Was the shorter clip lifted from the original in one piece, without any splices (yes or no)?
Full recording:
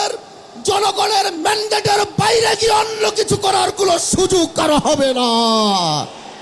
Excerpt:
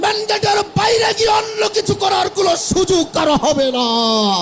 yes